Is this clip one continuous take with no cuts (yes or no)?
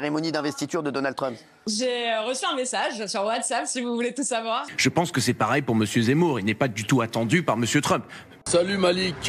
no